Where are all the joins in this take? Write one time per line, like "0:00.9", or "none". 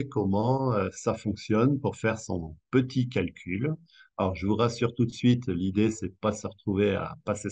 none